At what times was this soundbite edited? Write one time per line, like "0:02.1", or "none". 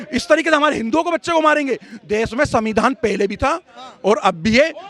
none